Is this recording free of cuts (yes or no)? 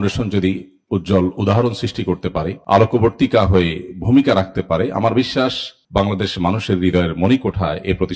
yes